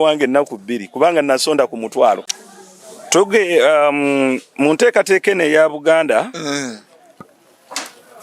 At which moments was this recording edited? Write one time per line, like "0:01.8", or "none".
0:02.3